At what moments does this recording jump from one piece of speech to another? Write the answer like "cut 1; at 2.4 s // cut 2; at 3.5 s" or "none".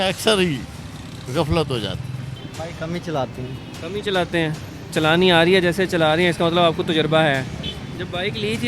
cut 1; at 2.4 s